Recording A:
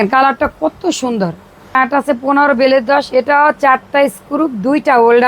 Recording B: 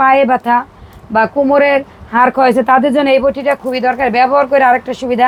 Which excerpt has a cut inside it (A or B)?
A